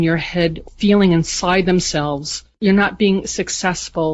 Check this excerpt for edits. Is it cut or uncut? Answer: uncut